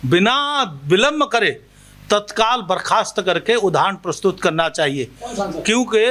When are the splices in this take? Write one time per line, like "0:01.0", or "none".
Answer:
none